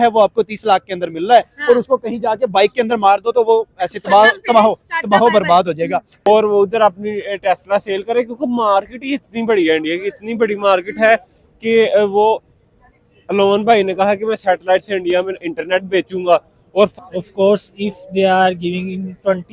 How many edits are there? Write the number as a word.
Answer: two